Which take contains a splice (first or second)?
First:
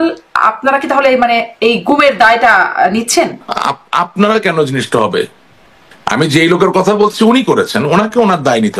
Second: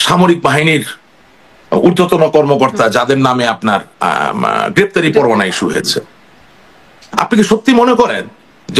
first